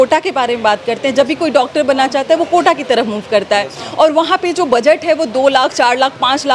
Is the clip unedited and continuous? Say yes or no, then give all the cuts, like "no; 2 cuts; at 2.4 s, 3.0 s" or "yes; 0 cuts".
yes; 0 cuts